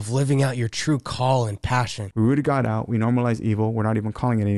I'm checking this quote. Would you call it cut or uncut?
cut